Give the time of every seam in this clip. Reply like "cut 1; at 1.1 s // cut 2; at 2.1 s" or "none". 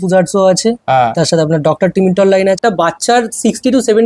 cut 1; at 2.6 s